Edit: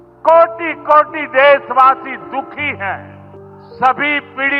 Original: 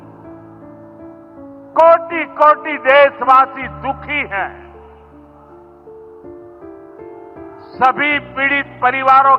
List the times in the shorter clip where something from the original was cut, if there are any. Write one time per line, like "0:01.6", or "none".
0:03.6